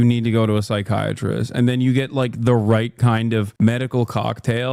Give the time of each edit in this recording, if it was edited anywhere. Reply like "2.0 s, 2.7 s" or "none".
3.5 s